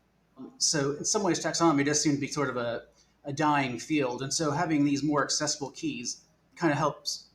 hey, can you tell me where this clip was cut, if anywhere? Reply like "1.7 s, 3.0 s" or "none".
none

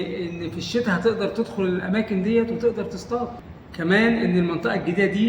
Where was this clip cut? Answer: 3.4 s

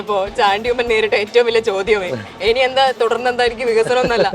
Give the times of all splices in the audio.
none

